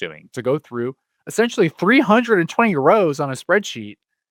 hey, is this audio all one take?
yes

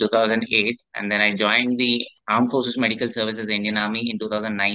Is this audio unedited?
no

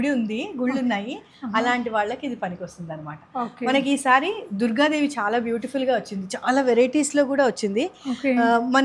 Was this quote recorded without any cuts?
yes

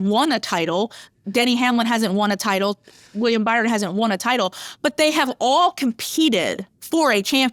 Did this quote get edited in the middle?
no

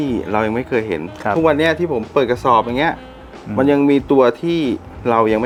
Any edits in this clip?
no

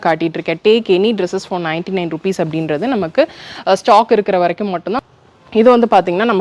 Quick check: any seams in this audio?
yes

